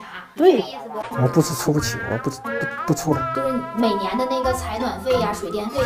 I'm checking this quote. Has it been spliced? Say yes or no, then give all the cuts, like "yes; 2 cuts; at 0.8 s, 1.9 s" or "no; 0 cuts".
yes; 1 cut; at 1.0 s